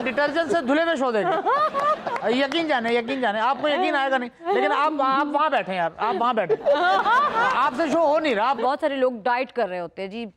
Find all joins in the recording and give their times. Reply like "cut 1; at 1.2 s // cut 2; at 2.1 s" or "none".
cut 1; at 8.6 s